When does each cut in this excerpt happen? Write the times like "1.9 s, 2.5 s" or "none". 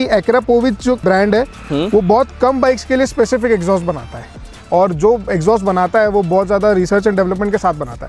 none